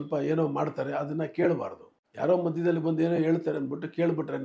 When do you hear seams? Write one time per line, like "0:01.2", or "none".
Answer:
none